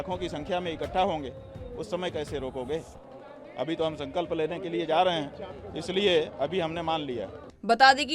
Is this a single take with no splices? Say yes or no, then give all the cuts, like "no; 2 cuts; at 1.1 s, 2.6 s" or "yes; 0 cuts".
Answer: yes; 0 cuts